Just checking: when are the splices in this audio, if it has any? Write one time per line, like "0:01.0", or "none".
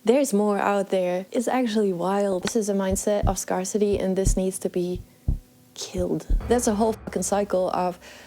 0:01.2
0:02.5
0:06.3